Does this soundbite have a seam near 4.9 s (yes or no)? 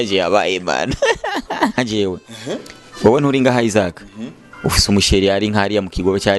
no